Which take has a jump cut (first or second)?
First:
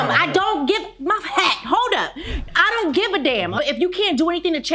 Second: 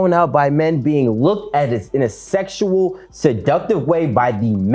first